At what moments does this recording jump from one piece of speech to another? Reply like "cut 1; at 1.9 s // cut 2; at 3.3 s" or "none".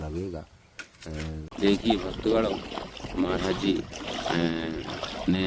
cut 1; at 1.5 s